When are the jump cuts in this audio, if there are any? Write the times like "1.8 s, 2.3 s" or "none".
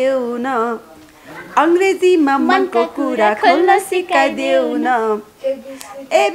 none